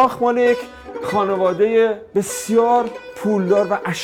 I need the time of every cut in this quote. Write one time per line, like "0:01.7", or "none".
none